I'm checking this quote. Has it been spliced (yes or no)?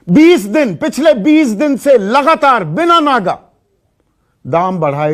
no